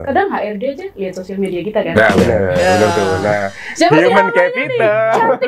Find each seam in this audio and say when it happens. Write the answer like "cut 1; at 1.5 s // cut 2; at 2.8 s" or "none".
none